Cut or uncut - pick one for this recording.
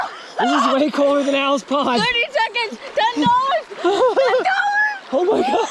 cut